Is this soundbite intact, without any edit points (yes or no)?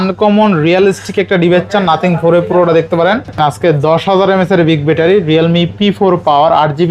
no